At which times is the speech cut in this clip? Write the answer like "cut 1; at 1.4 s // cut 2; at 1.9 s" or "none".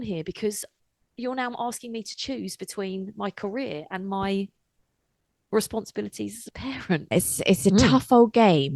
cut 1; at 7.1 s